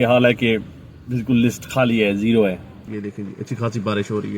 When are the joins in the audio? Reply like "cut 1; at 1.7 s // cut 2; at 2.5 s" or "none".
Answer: cut 1; at 2.7 s